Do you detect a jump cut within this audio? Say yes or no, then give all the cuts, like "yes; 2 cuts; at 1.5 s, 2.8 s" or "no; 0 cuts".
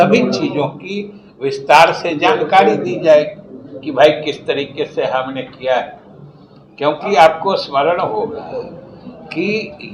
no; 0 cuts